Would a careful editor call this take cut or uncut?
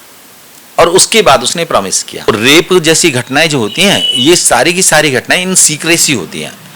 cut